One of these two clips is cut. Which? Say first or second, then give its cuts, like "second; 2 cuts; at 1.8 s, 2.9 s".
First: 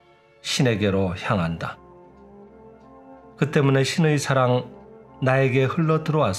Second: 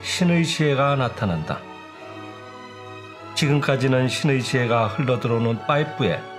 first; 2 cuts; at 1.8 s, 3.4 s